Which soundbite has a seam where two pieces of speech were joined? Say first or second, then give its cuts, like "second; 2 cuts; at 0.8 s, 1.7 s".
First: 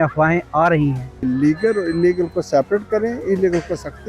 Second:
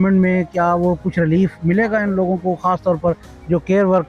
first; 1 cut; at 1.2 s